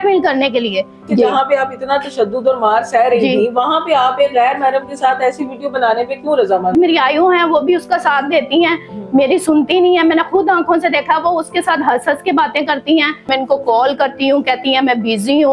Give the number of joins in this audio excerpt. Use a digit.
3